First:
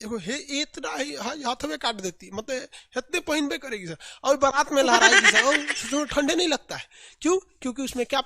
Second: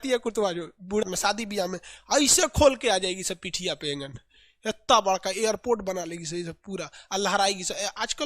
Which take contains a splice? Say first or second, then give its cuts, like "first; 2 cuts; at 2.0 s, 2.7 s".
second; 1 cut; at 1.0 s